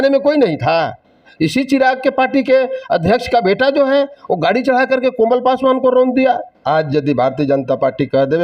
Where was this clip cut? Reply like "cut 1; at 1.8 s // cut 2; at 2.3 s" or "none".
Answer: cut 1; at 1.3 s // cut 2; at 6.5 s